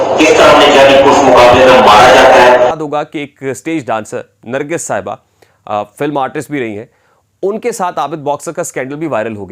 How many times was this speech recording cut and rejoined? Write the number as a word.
one